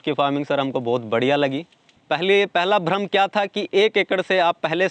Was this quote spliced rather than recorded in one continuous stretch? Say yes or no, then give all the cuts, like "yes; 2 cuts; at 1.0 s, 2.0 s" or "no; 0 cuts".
yes; 1 cut; at 1.9 s